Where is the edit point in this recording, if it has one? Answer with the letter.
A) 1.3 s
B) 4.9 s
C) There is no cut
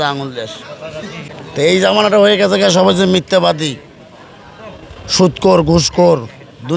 A